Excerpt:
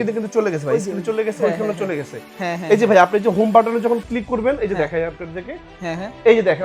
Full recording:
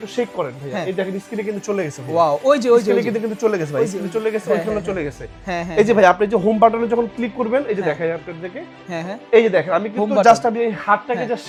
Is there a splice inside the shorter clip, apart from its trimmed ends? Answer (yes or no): no